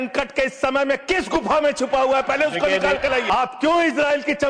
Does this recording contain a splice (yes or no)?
yes